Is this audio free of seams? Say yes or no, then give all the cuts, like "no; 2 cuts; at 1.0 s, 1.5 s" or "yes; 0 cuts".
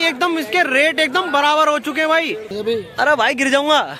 yes; 0 cuts